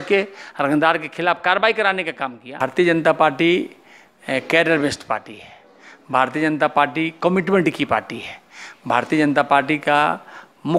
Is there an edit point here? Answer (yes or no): yes